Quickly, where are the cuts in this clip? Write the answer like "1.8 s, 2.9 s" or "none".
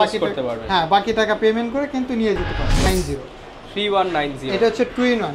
2.9 s